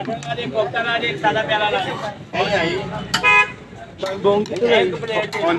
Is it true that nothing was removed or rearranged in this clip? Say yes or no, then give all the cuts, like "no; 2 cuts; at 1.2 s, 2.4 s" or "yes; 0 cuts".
no; 1 cut; at 2.4 s